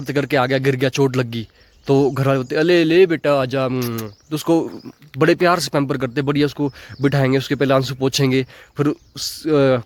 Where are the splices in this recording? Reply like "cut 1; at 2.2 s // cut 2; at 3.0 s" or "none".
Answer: none